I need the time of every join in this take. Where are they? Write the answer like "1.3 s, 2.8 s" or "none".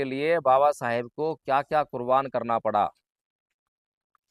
none